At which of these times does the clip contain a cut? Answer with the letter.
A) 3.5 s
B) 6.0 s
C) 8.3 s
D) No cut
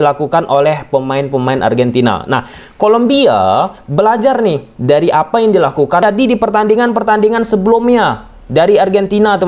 B